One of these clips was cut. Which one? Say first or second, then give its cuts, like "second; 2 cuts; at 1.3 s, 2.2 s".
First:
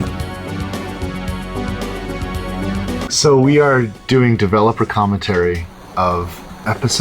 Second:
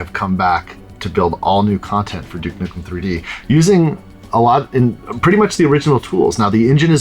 first; 1 cut; at 3.0 s